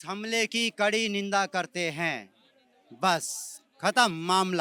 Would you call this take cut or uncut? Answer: uncut